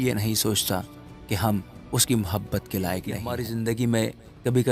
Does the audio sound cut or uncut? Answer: cut